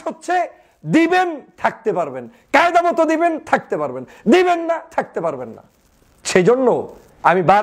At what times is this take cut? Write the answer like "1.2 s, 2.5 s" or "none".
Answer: none